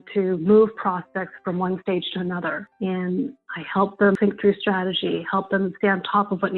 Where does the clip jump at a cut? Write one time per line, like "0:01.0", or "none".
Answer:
0:02.7
0:04.2